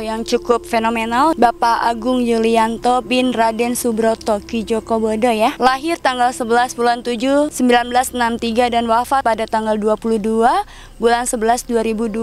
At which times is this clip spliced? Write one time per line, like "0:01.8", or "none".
0:01.3
0:05.6
0:07.5
0:09.2